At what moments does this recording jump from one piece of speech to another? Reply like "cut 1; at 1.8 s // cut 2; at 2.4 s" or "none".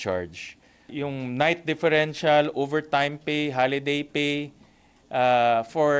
cut 1; at 1.0 s